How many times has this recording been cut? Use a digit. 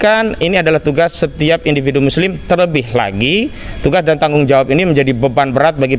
0